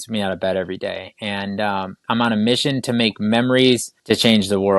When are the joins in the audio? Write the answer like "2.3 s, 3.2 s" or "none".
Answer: 2.0 s, 3.9 s

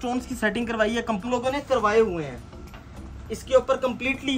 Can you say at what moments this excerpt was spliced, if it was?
1.3 s

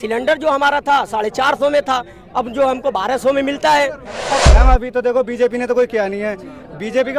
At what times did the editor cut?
4.4 s

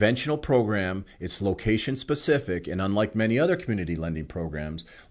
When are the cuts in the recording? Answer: none

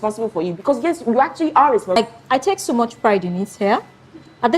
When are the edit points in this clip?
1.9 s

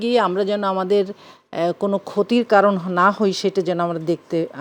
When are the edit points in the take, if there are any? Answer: none

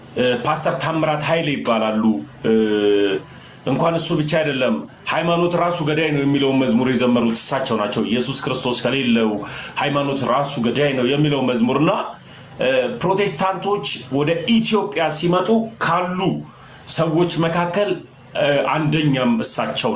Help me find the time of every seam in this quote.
none

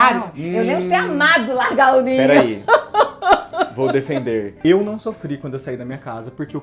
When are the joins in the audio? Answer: none

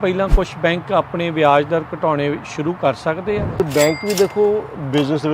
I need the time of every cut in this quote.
3.6 s

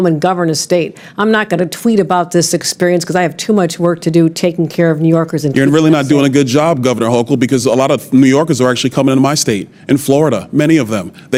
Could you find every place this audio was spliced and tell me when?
none

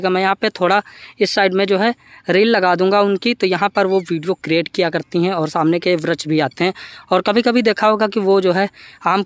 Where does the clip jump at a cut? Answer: none

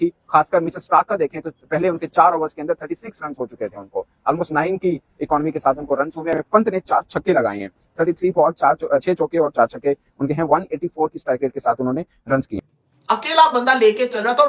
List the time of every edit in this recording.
6.3 s, 12.6 s

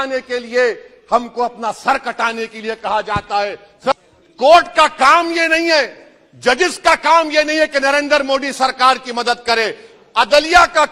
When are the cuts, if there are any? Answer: 3.9 s

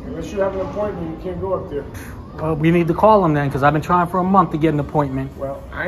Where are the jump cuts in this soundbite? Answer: none

